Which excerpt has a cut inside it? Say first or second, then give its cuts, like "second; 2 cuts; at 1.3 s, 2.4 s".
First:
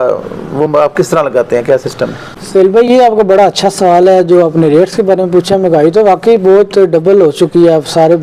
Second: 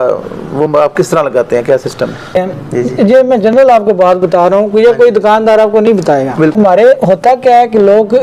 second; 2 cuts; at 2.4 s, 6.5 s